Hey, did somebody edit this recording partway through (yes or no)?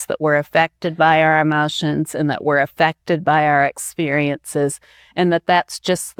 no